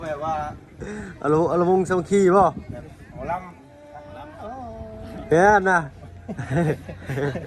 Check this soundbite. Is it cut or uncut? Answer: cut